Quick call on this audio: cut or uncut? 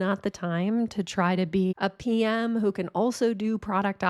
cut